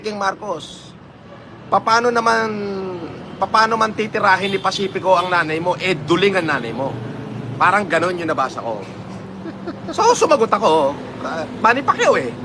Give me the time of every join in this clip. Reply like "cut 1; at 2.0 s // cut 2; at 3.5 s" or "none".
cut 1; at 4.5 s